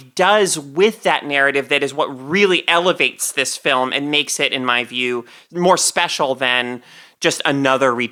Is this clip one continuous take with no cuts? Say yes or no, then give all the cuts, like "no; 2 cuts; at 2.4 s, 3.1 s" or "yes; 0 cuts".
yes; 0 cuts